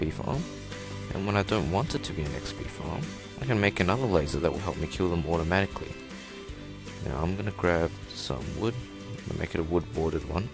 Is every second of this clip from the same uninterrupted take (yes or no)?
no